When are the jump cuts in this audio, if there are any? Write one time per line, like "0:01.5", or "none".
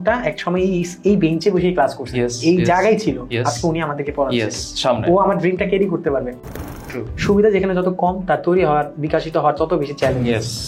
0:06.6